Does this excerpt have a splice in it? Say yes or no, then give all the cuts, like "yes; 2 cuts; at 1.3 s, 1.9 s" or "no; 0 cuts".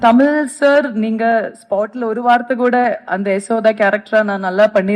no; 0 cuts